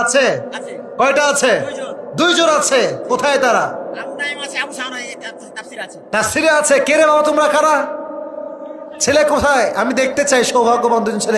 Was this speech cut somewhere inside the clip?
no; 0 cuts

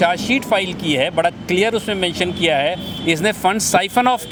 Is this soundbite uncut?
yes; 0 cuts

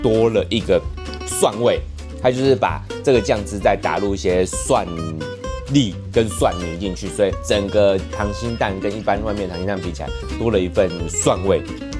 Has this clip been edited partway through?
no; 0 cuts

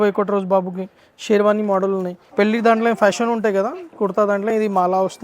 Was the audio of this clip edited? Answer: yes; 1 cut; at 2.2 s

